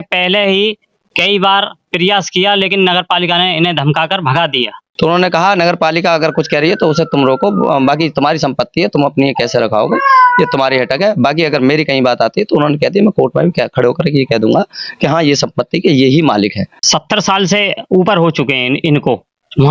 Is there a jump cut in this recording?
yes; 2 cuts; at 4.8 s, 16.7 s

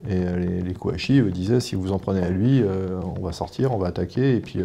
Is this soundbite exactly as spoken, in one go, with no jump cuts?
yes; 0 cuts

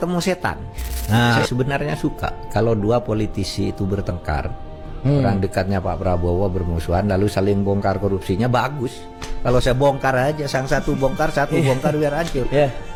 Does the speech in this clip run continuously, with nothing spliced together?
yes; 0 cuts

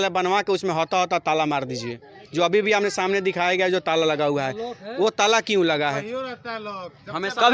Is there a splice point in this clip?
no; 0 cuts

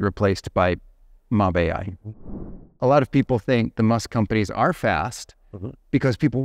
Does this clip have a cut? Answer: yes; 1 cut; at 2.3 s

